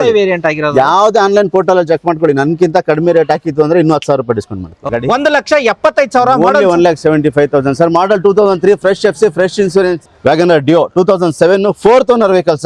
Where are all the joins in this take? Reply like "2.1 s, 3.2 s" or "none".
4.9 s, 10.0 s

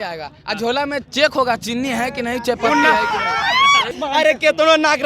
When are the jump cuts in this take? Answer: 3.9 s

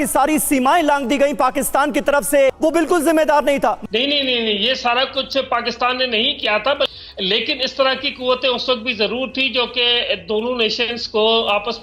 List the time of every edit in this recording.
2.6 s, 3.8 s, 6.9 s

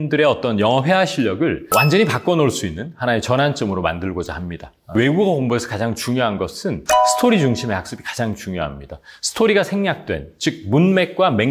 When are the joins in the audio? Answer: 1.6 s, 4.9 s

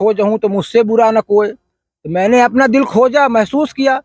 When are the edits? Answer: none

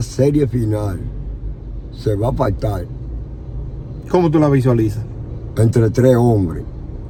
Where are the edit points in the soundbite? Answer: none

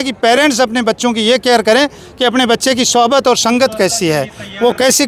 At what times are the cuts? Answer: none

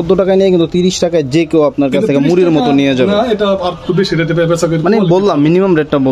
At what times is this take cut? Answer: none

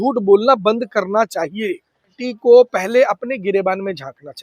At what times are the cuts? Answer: 2.2 s

